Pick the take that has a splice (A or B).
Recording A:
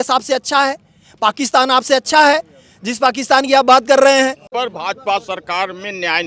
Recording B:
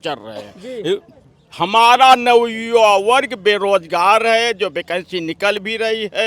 A